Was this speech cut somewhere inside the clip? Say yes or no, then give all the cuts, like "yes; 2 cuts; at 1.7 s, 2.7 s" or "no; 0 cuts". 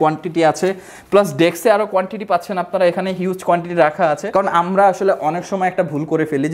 yes; 1 cut; at 4.2 s